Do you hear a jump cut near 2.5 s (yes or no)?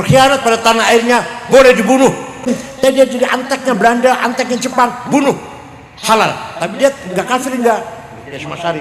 yes